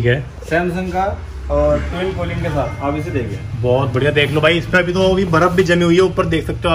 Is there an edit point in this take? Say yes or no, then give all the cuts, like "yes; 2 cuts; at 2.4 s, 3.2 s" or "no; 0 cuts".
no; 0 cuts